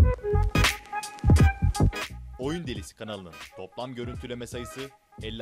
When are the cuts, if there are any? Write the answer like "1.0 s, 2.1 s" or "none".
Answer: 2.2 s